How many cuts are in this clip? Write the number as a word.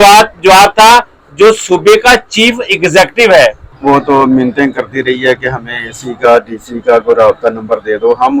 one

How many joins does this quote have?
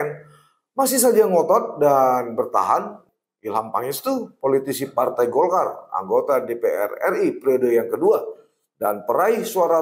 one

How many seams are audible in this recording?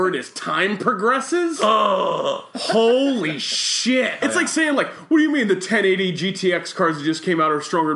one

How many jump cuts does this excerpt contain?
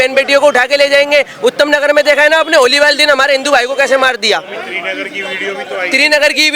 zero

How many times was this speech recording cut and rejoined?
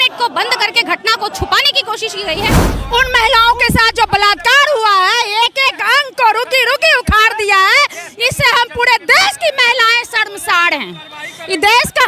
one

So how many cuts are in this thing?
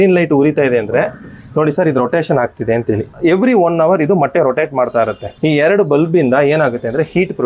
two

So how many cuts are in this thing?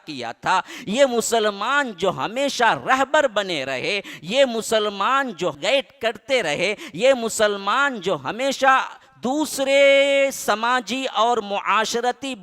one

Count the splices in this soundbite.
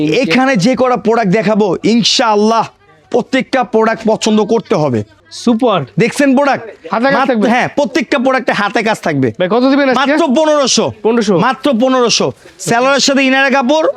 zero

